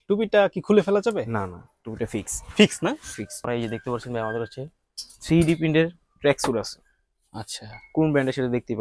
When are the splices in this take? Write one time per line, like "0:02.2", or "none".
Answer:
0:03.5